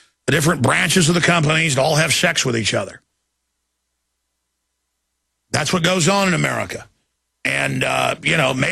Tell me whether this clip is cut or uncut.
cut